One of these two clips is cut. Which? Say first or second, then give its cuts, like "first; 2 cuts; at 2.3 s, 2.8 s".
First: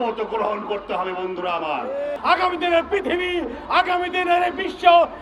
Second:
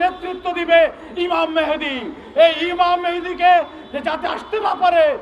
first; 1 cut; at 2.2 s